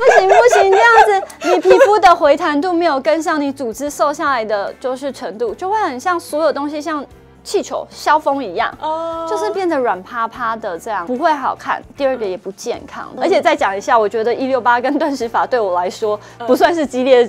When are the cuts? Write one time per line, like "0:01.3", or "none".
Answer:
0:11.0
0:13.1